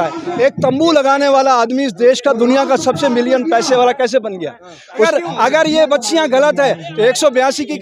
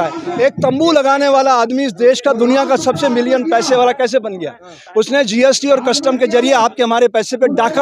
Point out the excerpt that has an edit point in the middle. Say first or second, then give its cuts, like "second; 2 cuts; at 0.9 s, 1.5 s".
first; 1 cut; at 4.8 s